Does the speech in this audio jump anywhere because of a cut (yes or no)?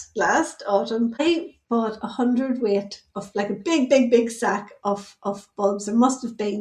yes